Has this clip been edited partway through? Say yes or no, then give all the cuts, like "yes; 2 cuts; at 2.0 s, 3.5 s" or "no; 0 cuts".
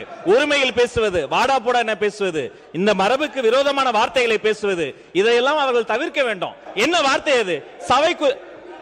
yes; 1 cut; at 6.6 s